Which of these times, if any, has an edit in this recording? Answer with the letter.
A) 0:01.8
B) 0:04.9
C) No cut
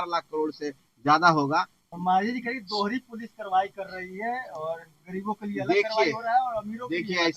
A